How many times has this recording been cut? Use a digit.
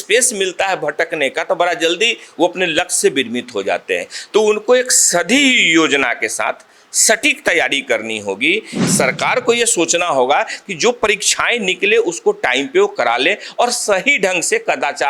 1